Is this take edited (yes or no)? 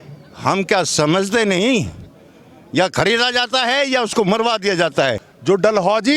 yes